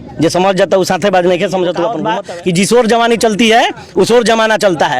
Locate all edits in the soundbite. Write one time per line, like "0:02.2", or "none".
0:02.1